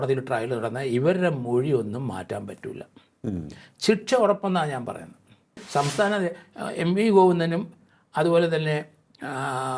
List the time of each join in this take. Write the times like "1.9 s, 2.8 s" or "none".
5.6 s